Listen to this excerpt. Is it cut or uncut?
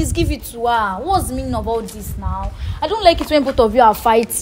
uncut